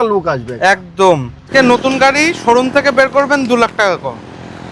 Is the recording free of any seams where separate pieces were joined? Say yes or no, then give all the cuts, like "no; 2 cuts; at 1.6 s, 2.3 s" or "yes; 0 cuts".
no; 1 cut; at 1.5 s